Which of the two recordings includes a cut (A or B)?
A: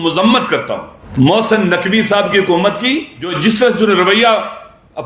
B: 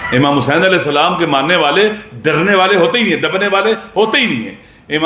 A